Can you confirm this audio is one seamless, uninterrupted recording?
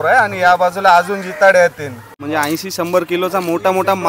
no; 1 cut; at 2.2 s

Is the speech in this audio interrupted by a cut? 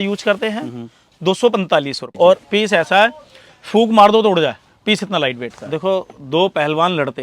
yes; 2 cuts; at 2.0 s, 5.5 s

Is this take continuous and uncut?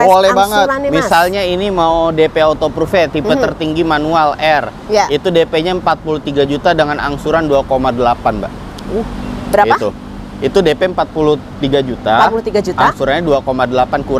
yes; 0 cuts

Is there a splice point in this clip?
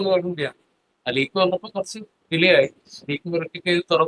no; 0 cuts

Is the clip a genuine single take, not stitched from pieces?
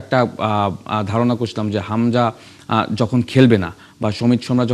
yes; 0 cuts

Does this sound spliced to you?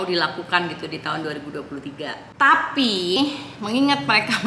yes; 1 cut; at 3.2 s

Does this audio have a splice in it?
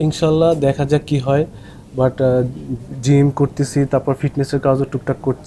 no; 0 cuts

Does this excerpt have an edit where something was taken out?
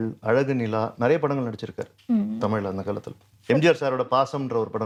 no; 0 cuts

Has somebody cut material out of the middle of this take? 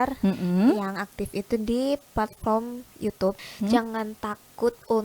yes; 1 cut; at 3.4 s

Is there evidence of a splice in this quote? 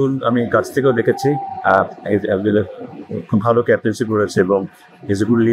no; 0 cuts

